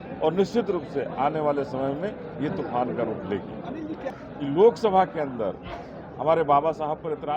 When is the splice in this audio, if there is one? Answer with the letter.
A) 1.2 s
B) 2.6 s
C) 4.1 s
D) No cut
C